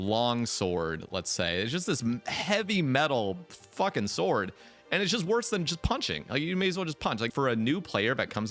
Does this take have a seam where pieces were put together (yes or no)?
yes